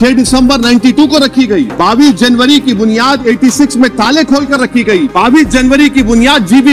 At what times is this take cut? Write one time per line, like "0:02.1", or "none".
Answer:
0:01.7
0:05.1